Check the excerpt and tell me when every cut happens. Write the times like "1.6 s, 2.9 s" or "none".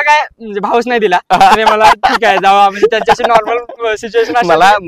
none